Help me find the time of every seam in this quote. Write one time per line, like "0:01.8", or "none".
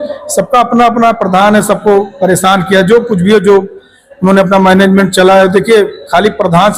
none

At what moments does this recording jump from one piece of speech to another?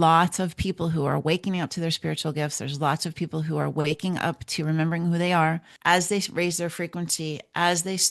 0:05.7

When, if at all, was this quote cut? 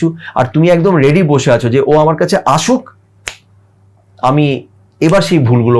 none

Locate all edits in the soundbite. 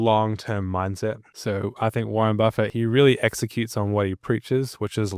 0:01.3
0:02.7

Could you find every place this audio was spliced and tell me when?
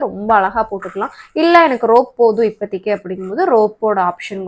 none

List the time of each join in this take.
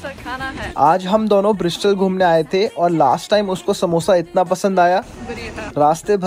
none

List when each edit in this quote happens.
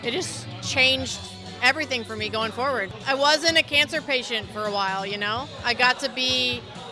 0:02.9

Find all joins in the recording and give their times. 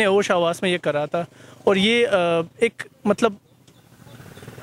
none

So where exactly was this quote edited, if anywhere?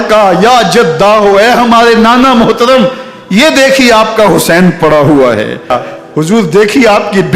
0:05.7

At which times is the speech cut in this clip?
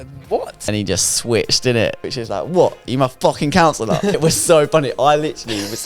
0:00.7
0:02.1
0:04.2

